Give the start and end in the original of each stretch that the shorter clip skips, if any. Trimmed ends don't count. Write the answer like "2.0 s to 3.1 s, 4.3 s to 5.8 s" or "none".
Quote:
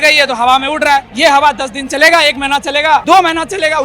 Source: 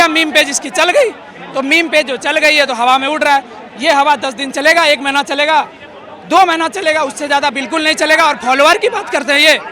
3.5 s to 3.7 s, 5.7 s to 6.3 s